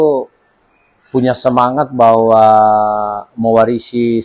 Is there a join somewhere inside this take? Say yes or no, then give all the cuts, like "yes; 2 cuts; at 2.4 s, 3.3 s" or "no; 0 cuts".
no; 0 cuts